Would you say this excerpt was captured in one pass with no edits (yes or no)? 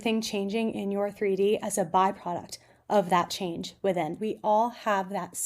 no